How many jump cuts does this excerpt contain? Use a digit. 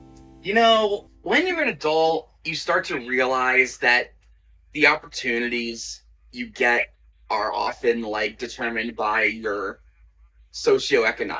1